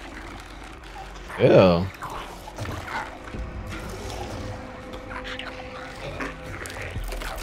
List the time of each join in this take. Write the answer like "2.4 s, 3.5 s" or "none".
none